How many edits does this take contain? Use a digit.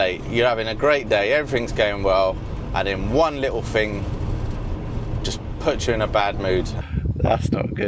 1